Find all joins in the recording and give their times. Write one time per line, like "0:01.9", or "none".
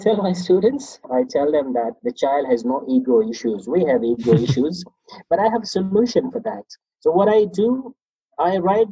0:01.0
0:02.0